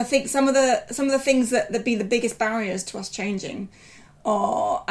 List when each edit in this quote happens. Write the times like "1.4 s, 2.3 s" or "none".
none